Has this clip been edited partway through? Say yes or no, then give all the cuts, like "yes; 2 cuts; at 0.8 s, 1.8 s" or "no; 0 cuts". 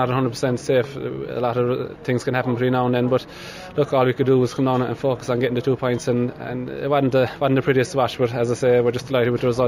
no; 0 cuts